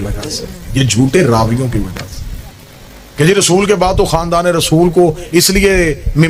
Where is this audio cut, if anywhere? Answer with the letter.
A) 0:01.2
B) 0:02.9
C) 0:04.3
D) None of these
D